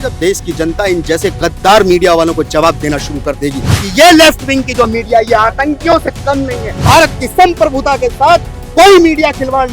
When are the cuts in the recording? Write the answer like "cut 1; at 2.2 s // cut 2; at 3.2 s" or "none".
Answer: cut 1; at 3.7 s // cut 2; at 6.8 s